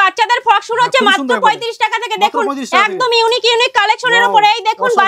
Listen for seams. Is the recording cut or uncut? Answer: uncut